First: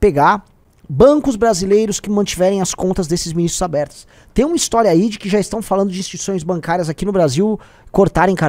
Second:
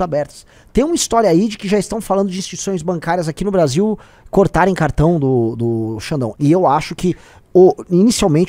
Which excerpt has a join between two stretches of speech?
second; 1 cut; at 6.3 s

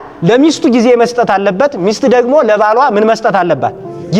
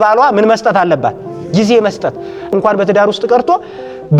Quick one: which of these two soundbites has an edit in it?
second; 1 cut; at 2.5 s

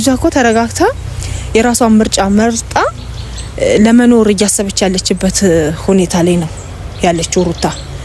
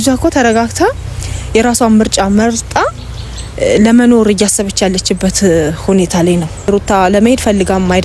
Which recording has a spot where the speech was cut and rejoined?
second; 1 cut; at 6.7 s

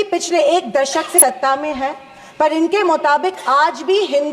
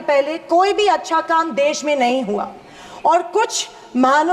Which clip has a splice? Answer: first; 1 cut; at 1.2 s

